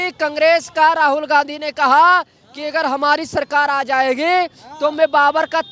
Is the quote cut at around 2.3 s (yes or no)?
no